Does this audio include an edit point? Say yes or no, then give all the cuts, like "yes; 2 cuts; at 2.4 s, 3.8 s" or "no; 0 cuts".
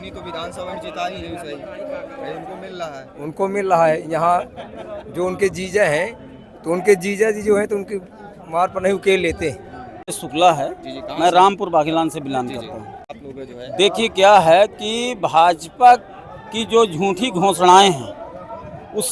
yes; 2 cuts; at 10.2 s, 13.2 s